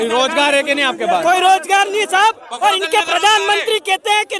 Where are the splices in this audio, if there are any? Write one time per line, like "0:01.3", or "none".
none